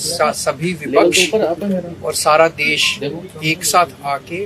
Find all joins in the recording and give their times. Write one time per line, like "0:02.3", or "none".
none